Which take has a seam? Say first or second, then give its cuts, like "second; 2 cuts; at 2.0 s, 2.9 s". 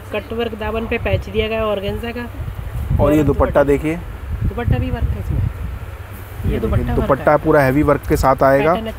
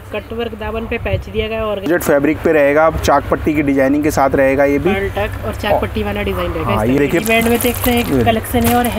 second; 2 cuts; at 1.9 s, 7.0 s